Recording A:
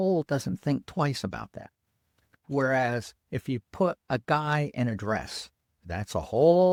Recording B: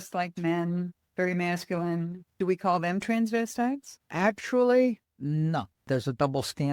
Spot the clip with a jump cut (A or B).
B